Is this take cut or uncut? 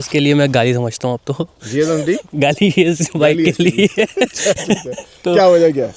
uncut